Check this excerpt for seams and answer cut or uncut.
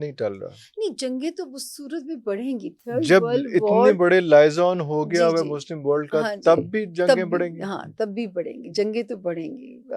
uncut